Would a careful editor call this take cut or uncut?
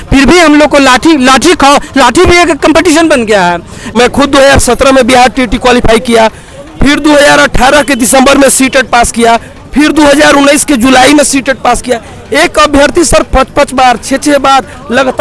cut